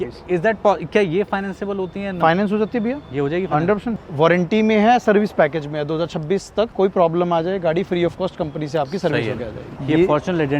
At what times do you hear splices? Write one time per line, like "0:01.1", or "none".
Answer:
0:03.9
0:06.7
0:09.8